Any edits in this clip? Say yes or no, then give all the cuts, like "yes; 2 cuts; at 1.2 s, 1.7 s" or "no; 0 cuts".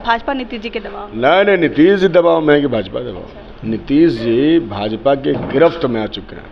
no; 0 cuts